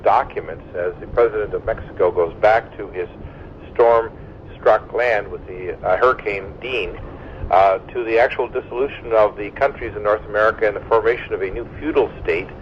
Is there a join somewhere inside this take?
yes; 1 cut; at 9.0 s

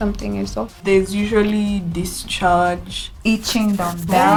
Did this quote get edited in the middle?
no; 0 cuts

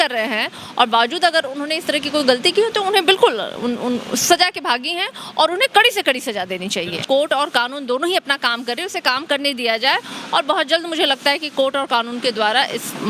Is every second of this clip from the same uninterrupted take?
no; 1 cut; at 7.0 s

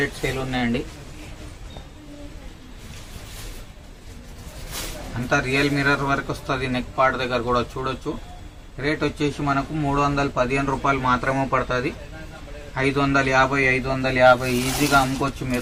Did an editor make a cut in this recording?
no; 0 cuts

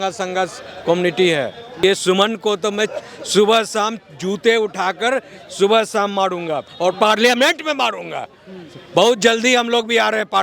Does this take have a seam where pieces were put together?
yes; 1 cut; at 1.8 s

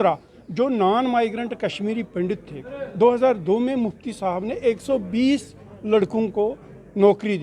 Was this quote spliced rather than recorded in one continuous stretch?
no; 0 cuts

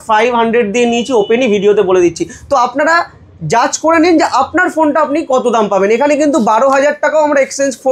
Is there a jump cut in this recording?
no; 0 cuts

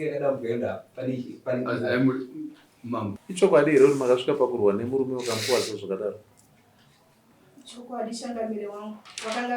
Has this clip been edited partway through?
yes; 1 cut; at 3.2 s

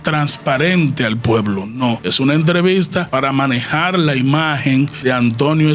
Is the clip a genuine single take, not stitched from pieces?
no; 3 cuts; at 2.1 s, 3.1 s, 4.9 s

